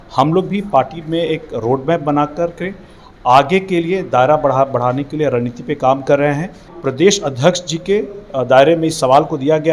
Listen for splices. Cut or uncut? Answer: cut